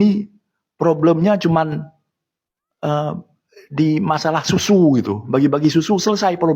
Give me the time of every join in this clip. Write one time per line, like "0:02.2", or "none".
none